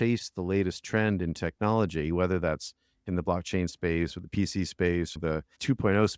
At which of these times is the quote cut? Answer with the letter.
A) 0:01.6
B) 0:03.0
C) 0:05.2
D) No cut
C